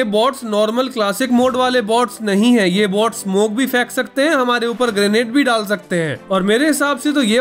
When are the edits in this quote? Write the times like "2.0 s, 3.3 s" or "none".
6.2 s